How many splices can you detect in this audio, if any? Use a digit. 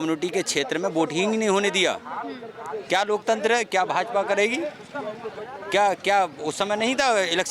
0